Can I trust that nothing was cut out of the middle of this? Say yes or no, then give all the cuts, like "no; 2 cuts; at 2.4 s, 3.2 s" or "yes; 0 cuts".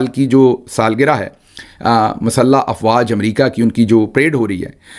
yes; 0 cuts